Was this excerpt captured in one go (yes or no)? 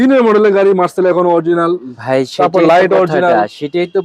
yes